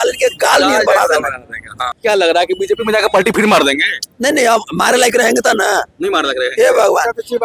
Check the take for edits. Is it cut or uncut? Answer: cut